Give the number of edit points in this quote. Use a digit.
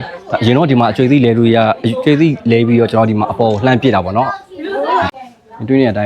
1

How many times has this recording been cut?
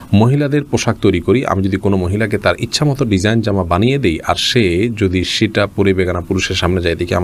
0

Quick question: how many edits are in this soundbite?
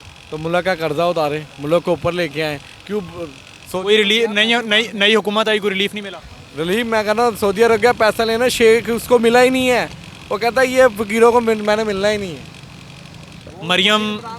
0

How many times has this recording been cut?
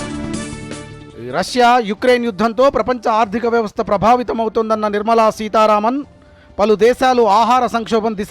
1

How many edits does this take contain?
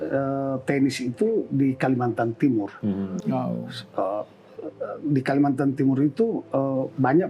0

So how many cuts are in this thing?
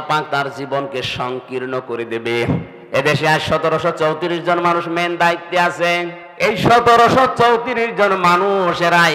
2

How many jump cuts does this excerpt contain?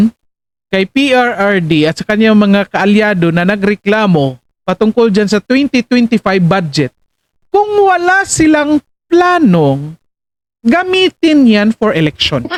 0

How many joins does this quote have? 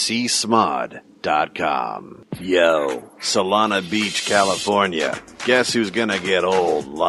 1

